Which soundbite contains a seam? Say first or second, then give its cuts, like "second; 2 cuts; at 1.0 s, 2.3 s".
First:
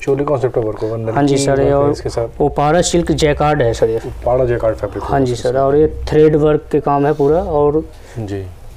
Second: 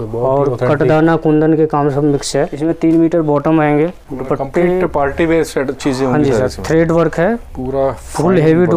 second; 2 cuts; at 2.5 s, 4.1 s